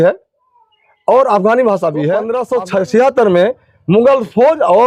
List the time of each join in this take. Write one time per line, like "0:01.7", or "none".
0:02.5